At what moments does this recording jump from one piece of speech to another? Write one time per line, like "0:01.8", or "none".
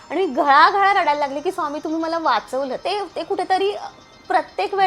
0:02.8